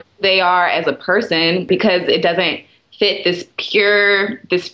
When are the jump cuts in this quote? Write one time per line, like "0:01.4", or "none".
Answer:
none